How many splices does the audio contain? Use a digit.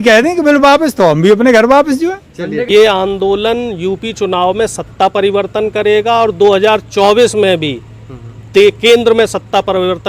1